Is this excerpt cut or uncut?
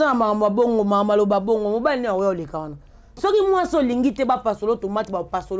cut